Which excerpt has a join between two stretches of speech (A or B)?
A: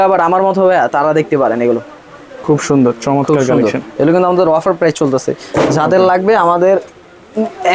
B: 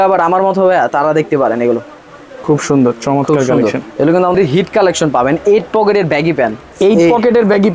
B